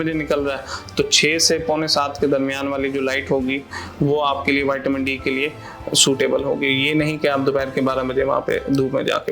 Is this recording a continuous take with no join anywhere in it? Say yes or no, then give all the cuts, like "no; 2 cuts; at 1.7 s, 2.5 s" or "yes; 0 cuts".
yes; 0 cuts